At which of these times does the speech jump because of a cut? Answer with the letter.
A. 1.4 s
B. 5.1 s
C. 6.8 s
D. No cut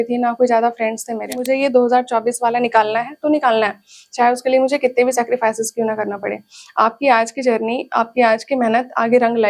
A